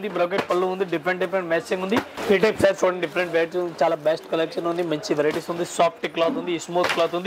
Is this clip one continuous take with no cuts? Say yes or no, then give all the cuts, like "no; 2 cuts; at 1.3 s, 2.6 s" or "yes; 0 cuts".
no; 1 cut; at 2.1 s